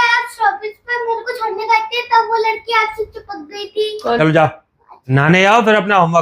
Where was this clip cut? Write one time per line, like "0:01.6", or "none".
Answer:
0:04.2
0:05.1